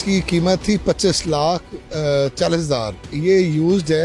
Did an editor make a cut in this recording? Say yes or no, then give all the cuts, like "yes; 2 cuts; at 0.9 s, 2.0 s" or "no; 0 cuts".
yes; 1 cut; at 3.1 s